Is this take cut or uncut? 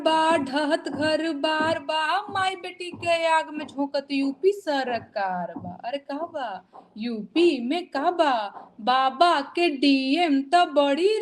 uncut